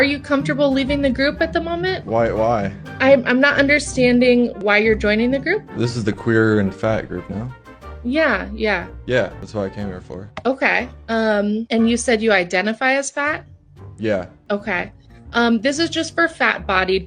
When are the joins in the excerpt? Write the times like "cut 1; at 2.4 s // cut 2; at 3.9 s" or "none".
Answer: cut 1; at 9.4 s // cut 2; at 14.4 s